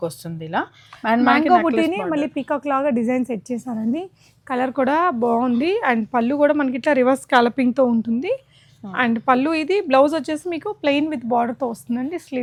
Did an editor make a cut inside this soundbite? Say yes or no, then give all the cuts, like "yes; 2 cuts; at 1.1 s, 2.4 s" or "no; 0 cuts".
no; 0 cuts